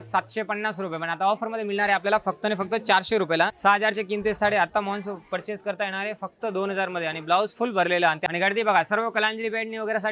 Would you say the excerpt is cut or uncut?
cut